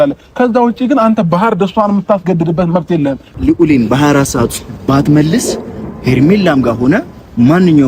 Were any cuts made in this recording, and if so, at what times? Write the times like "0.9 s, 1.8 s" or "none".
3.3 s

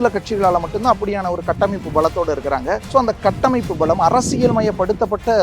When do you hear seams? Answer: 2.8 s

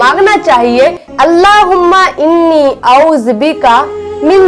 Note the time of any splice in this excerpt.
1.0 s

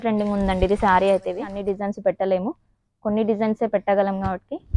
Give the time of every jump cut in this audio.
1.6 s

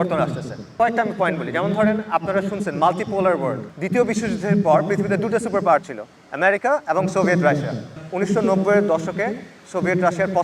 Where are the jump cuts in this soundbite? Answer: 0.7 s, 3.7 s, 8.0 s

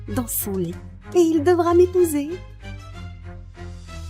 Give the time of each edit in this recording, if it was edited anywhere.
2.4 s

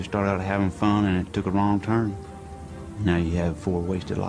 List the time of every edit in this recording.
2.2 s

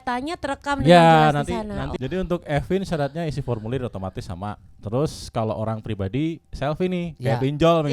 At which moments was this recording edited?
1.9 s

